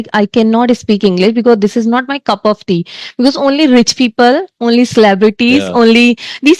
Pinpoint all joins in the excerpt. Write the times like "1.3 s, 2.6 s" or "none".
none